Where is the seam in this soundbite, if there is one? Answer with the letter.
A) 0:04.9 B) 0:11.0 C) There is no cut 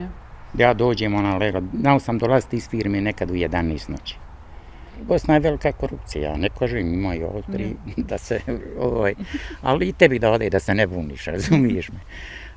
A